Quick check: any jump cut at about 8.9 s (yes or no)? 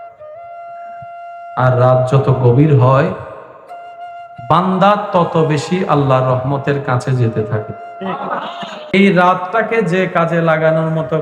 yes